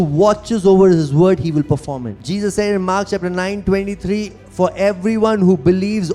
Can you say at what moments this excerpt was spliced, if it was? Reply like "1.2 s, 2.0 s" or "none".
2.2 s